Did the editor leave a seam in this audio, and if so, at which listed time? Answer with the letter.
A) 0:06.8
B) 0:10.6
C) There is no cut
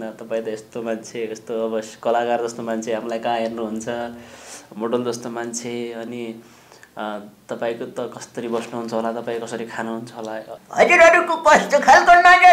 B